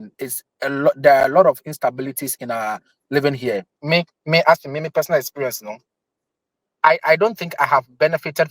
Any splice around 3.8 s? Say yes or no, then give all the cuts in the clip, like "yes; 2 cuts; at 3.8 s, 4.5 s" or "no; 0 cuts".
yes; 1 cut; at 3.8 s